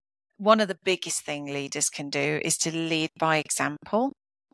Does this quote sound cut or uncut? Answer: uncut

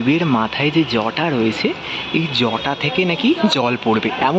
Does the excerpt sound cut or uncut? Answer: uncut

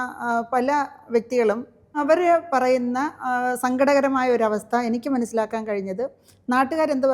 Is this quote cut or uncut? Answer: cut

